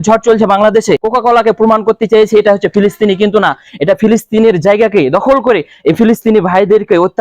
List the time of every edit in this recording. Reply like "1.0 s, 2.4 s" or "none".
1.0 s